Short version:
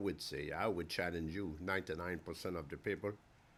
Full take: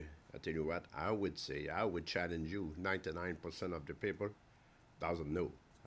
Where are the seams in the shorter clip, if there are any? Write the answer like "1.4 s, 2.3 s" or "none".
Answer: none